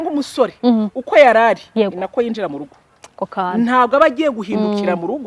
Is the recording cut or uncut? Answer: uncut